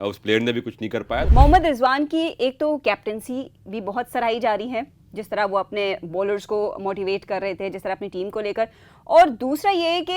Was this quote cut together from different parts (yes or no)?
yes